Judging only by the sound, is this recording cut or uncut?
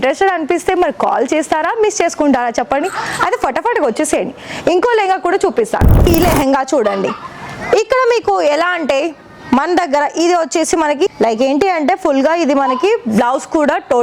cut